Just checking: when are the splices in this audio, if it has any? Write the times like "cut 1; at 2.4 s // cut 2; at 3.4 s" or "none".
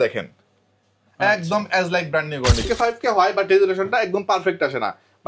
cut 1; at 2.7 s